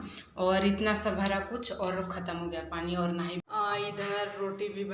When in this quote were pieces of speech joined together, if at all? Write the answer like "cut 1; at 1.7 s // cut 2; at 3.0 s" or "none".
cut 1; at 3.4 s